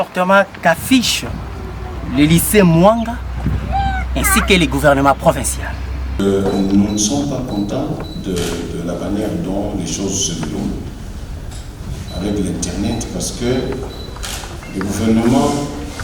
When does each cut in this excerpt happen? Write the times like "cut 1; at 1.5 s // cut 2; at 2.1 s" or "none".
cut 1; at 6.0 s